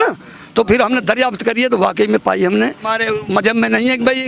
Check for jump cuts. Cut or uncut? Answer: cut